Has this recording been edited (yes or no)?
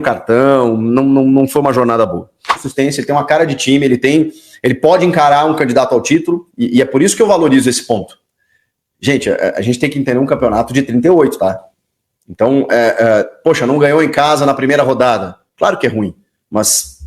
yes